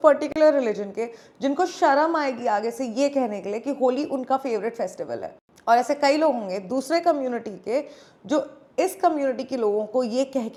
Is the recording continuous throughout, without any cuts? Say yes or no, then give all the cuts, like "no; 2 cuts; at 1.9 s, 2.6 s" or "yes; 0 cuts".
yes; 0 cuts